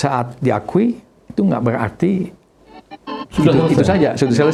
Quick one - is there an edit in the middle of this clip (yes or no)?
no